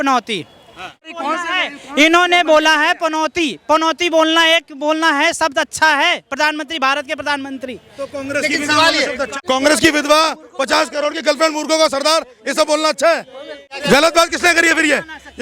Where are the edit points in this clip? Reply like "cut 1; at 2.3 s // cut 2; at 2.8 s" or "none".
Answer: cut 1; at 1.0 s // cut 2; at 9.3 s // cut 3; at 13.7 s